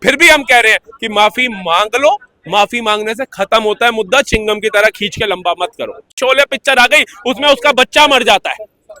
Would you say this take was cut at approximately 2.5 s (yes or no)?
no